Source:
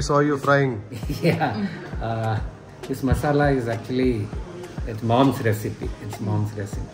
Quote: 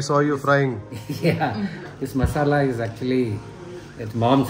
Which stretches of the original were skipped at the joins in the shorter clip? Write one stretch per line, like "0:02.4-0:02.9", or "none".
0:01.8-0:02.7